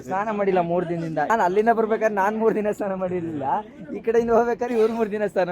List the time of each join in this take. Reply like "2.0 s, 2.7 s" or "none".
1.3 s